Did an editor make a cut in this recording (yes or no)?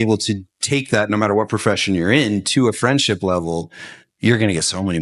no